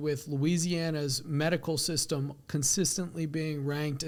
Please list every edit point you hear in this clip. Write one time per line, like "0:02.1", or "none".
none

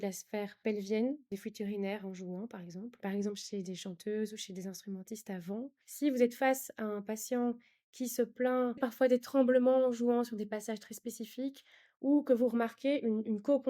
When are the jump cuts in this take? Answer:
0:01.3
0:03.0
0:05.8
0:08.8

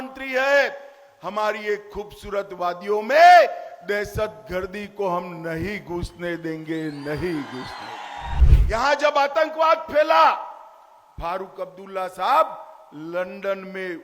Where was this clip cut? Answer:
0:08.4

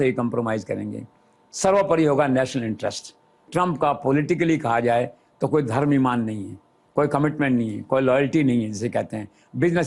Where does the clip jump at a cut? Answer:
0:03.5

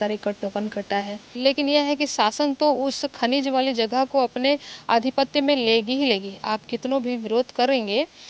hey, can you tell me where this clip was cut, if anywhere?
0:01.4

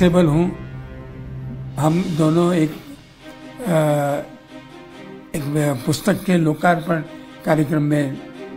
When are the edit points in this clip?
none

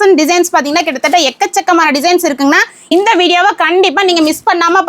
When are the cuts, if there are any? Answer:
0:02.9

